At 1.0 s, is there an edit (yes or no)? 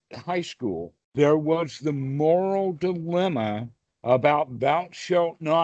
yes